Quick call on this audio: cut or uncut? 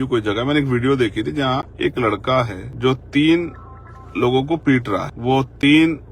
cut